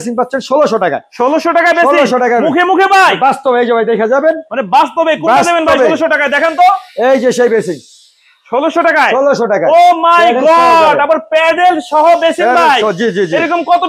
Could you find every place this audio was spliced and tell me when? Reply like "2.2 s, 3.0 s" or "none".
none